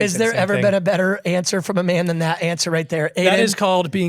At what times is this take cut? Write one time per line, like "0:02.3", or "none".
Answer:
none